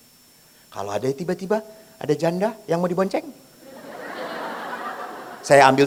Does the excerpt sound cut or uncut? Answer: uncut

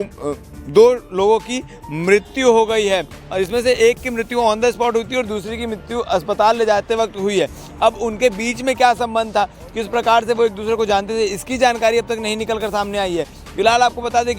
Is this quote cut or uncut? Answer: uncut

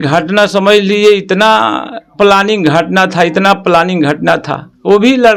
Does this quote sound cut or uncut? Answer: uncut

